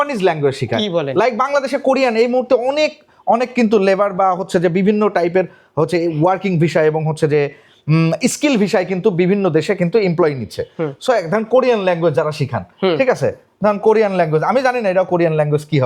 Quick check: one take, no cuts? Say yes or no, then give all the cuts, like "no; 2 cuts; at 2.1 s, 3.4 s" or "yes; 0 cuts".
yes; 0 cuts